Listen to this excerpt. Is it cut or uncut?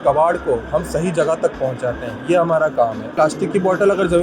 cut